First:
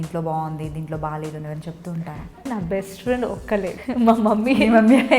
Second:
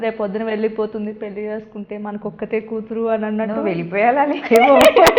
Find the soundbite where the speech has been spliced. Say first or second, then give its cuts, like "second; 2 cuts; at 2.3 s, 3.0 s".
first; 2 cuts; at 2.4 s, 3.7 s